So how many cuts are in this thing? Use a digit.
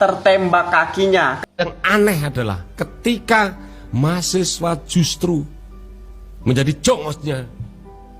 1